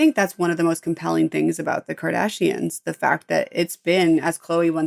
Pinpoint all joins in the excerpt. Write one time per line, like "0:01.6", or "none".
none